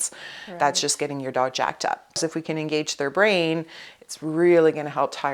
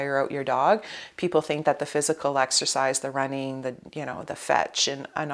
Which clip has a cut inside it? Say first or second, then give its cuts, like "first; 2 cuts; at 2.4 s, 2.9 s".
first; 1 cut; at 2.2 s